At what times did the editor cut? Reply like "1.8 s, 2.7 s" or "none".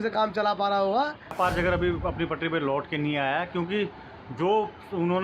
1.3 s